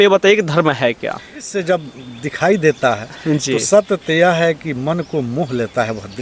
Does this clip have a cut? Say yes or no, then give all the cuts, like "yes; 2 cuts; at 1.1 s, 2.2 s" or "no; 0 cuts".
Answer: yes; 1 cut; at 1.5 s